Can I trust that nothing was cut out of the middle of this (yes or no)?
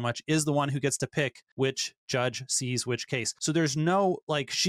no